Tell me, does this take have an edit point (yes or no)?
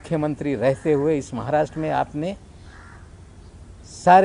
no